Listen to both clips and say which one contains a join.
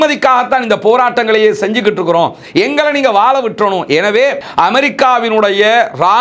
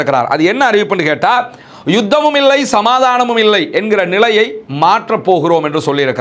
first; 1 cut; at 4.4 s

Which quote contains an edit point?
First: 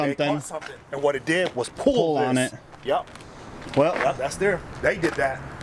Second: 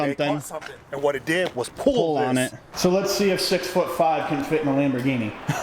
second; 1 cut; at 2.6 s

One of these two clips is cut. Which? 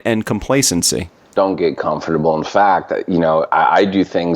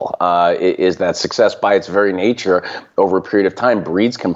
first; 1 cut; at 1.3 s

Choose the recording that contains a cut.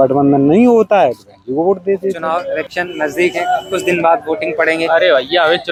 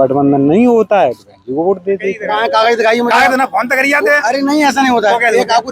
second; 1 cut; at 2.2 s

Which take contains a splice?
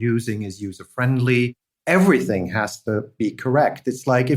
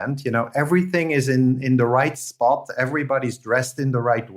first; 1 cut; at 1.7 s

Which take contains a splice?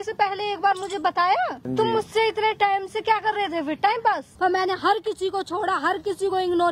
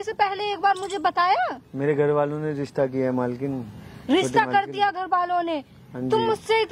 first; 2 cuts; at 1.6 s, 4.3 s

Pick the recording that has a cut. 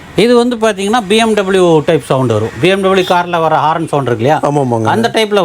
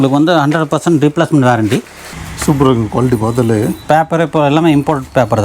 second; 1 cut; at 2.0 s

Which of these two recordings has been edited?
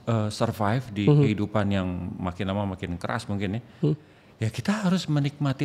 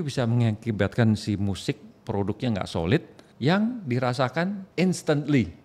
second; 2 cuts; at 3.2 s, 4.6 s

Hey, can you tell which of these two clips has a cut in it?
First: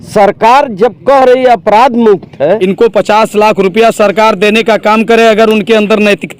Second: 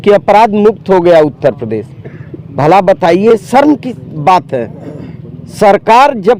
first; 1 cut; at 2.6 s

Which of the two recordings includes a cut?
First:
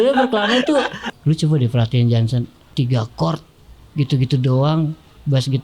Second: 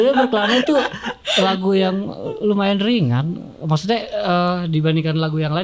first; 2 cuts; at 1.1 s, 2.6 s

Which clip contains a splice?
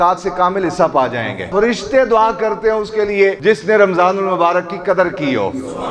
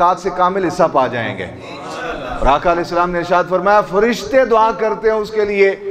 first; 2 cuts; at 1.5 s, 3.4 s

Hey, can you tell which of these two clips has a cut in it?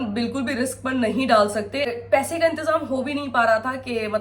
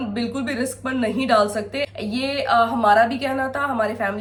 first; 1 cut; at 2.0 s

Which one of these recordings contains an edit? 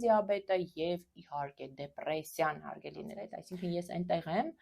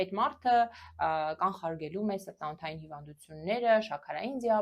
first; 1 cut; at 3.4 s

